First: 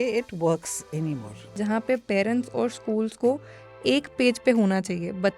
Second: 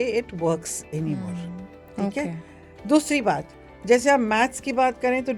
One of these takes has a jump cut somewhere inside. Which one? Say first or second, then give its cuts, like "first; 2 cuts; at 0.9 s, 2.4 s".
first; 1 cut; at 1.5 s